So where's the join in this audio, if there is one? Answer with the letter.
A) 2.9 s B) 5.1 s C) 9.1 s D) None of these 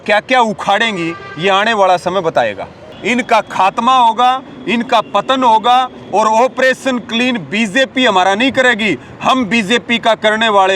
A